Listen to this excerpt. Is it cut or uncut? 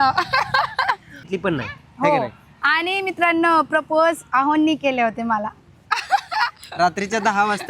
cut